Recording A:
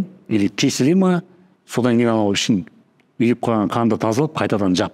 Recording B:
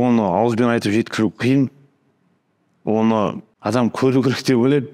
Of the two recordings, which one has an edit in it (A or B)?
B